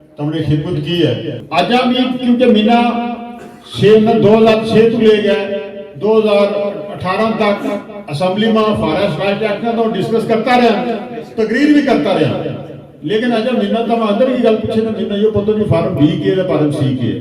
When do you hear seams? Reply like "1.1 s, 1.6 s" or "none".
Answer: 1.4 s